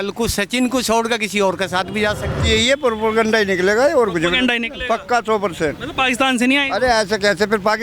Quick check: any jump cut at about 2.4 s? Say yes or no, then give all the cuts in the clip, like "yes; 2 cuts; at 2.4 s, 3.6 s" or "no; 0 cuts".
yes; 1 cut; at 2.4 s